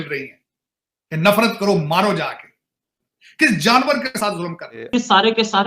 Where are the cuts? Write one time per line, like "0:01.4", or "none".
0:04.7